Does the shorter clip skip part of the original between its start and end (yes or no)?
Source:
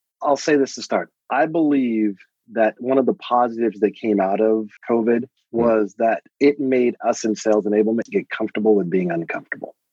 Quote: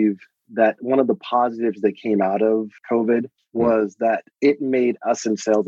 no